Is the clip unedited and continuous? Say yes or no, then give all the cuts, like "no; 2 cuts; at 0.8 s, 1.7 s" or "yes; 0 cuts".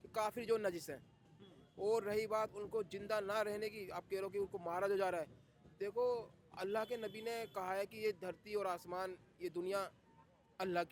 yes; 0 cuts